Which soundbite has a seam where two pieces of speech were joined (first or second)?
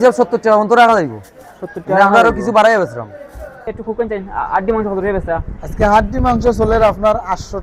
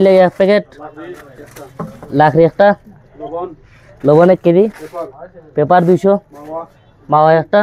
first